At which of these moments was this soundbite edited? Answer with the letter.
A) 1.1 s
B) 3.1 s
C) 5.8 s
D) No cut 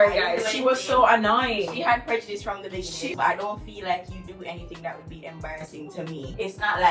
B